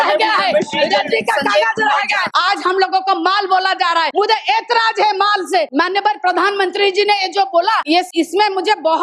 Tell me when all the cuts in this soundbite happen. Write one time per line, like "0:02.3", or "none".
0:02.3
0:04.1
0:05.7
0:08.0

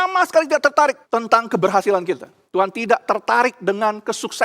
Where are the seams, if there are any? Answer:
0:01.0
0:02.3

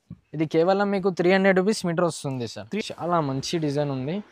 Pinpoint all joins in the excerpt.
0:02.6

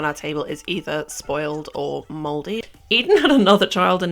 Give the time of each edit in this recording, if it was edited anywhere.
0:02.6

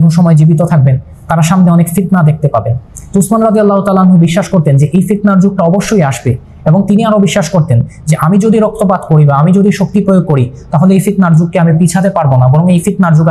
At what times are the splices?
none

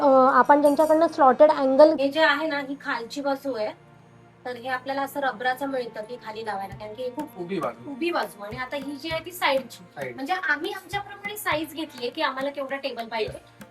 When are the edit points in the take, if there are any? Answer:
0:02.0
0:07.3

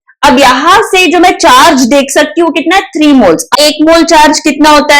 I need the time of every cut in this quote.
0:03.5

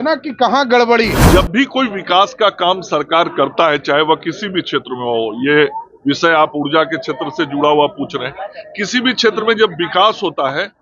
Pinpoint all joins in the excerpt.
0:01.2

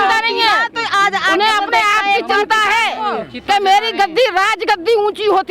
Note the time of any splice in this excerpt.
none

